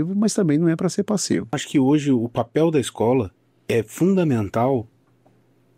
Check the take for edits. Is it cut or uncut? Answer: cut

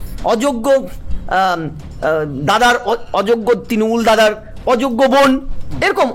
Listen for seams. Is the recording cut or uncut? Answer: uncut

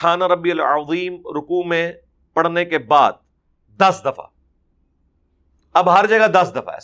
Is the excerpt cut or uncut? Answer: uncut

